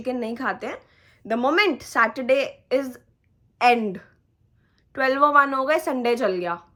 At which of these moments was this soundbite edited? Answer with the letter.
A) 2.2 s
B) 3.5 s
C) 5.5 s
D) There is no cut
D